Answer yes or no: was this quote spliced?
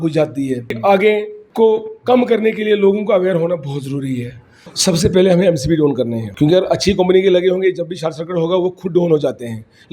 yes